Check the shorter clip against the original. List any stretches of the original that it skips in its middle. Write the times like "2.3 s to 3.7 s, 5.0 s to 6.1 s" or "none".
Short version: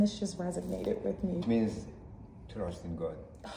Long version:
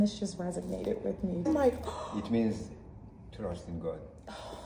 1.4 s to 2.2 s